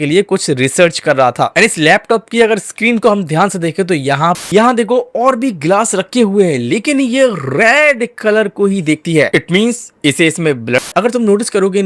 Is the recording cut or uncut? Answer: cut